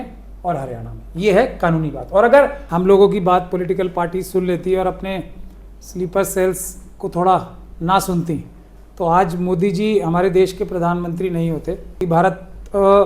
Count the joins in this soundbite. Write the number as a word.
two